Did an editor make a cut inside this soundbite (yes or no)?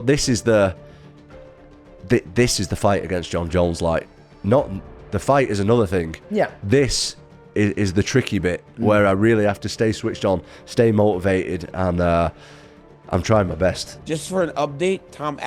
yes